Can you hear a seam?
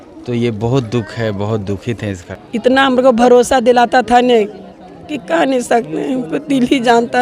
yes; 1 cut; at 2.3 s

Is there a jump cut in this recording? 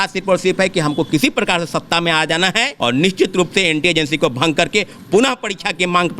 yes; 1 cut; at 2.7 s

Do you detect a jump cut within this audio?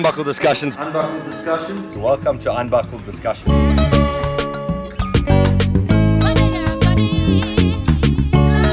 no; 0 cuts

